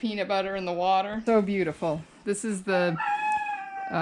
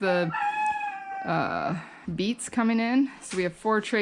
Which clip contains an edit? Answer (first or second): first